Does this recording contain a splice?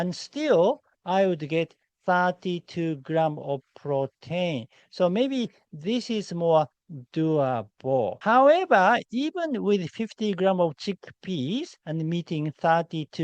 yes; 1 cut; at 8.2 s

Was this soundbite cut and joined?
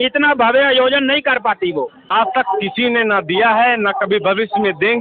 yes; 1 cut; at 2.1 s

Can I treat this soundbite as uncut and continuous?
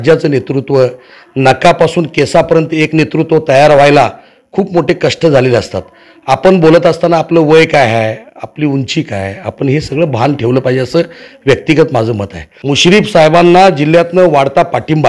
yes; 0 cuts

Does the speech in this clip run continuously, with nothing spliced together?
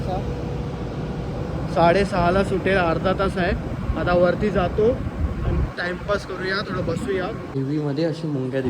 no; 1 cut; at 7.5 s

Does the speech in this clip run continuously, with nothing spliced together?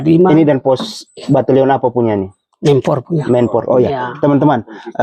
yes; 0 cuts

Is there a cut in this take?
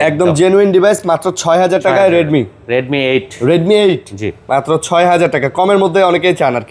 no; 0 cuts

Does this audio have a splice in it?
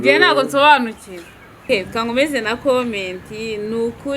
yes; 1 cut; at 1.6 s

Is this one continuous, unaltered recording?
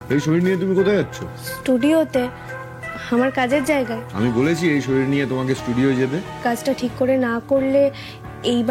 no; 2 cuts; at 4.0 s, 6.4 s

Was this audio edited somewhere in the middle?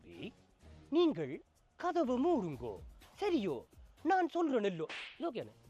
no; 0 cuts

